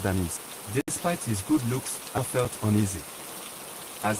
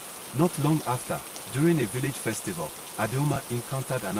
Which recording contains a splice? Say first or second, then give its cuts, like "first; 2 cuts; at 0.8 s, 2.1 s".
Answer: first; 2 cuts; at 1.0 s, 2.2 s